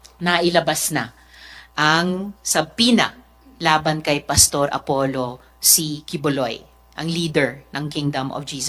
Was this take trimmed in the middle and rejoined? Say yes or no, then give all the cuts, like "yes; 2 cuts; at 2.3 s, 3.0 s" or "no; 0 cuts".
no; 0 cuts